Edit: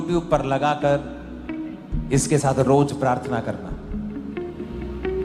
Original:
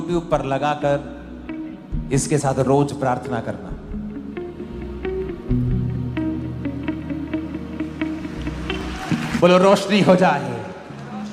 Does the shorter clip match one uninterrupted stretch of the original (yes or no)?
yes